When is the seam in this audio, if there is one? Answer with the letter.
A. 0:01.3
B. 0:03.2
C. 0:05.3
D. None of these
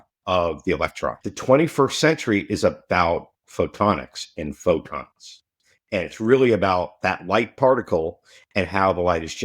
A